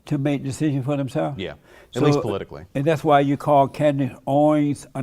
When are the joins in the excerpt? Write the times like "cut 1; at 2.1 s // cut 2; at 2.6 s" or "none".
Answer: none